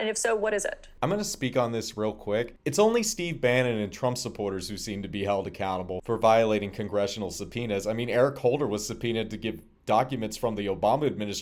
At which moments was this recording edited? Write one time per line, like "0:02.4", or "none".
none